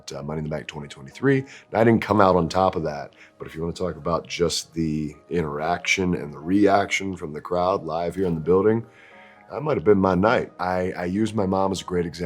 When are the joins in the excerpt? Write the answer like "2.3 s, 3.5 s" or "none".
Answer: 10.6 s